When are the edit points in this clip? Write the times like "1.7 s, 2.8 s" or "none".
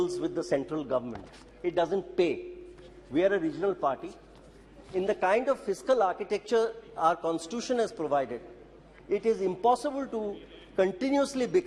none